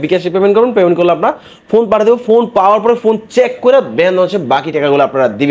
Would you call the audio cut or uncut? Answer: uncut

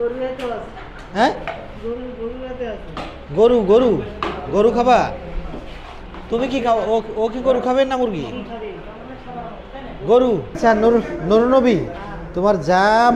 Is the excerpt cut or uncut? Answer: cut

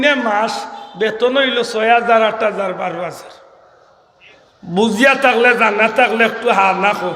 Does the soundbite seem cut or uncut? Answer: uncut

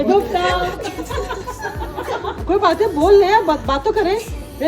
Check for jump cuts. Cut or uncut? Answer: uncut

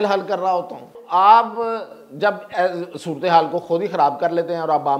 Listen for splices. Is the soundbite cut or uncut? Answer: cut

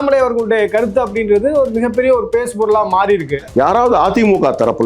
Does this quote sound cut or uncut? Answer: cut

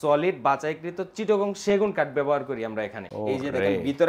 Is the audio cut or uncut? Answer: cut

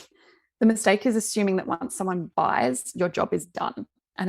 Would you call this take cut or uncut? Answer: uncut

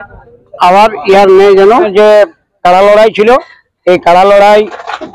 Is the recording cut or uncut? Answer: cut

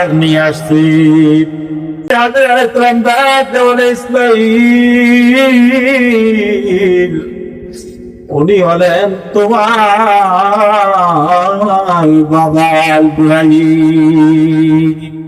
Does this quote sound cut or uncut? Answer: cut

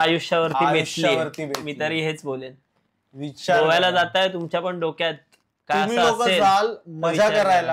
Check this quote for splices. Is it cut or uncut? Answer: uncut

